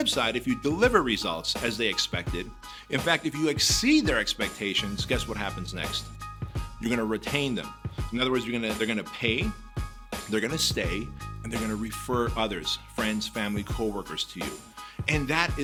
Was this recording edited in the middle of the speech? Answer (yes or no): no